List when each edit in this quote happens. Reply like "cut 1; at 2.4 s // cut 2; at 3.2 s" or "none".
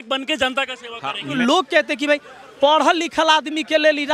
cut 1; at 1.3 s